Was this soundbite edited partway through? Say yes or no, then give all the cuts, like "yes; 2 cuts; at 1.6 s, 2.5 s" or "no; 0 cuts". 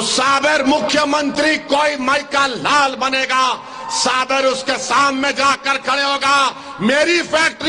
no; 0 cuts